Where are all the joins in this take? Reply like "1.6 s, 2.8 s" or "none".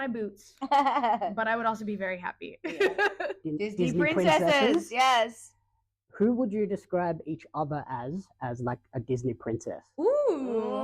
3.4 s